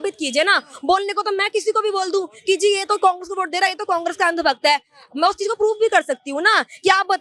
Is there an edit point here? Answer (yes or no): no